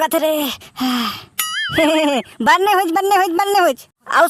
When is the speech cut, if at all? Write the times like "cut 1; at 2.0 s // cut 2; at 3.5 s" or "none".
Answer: none